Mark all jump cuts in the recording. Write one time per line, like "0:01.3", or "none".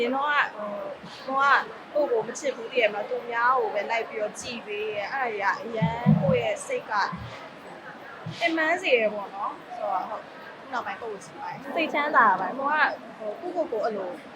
0:11.6